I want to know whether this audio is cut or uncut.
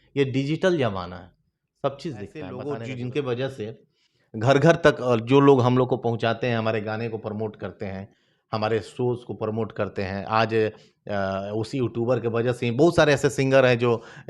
cut